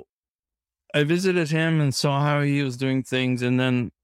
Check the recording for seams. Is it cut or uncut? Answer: uncut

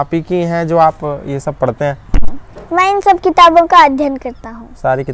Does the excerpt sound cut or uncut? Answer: uncut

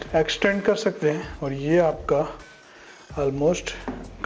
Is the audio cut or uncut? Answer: uncut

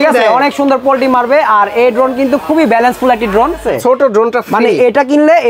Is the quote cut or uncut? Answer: cut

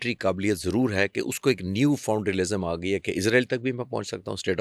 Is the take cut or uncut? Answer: uncut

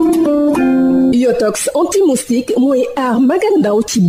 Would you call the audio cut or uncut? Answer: cut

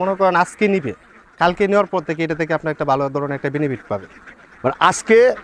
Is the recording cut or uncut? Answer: uncut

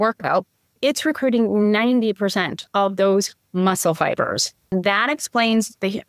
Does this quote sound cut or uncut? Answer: cut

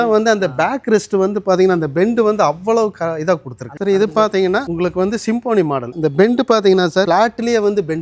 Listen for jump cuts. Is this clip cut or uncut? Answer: cut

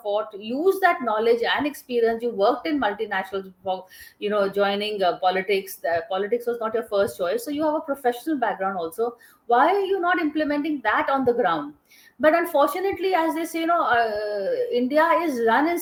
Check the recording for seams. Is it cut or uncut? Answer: uncut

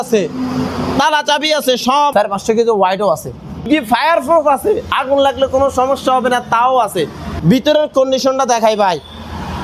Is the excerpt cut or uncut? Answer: cut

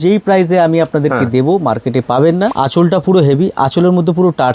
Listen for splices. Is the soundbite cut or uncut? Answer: cut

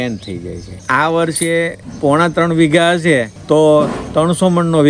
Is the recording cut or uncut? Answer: cut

